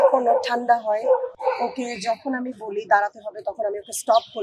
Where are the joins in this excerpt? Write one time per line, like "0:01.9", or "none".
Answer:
0:01.3